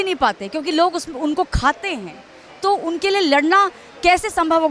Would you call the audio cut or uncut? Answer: uncut